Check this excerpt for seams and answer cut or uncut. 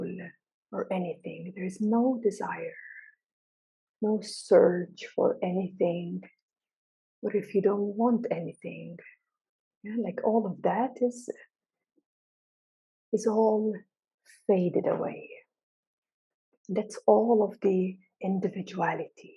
cut